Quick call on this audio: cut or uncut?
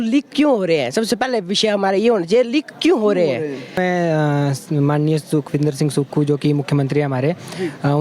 cut